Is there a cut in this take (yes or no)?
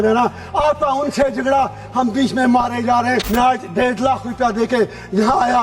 yes